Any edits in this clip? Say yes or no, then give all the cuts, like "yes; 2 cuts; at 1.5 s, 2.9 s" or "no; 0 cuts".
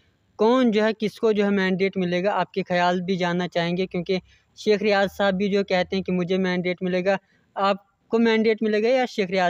no; 0 cuts